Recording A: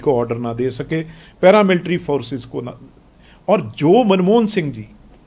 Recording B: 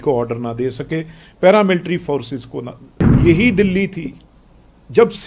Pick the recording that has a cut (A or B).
B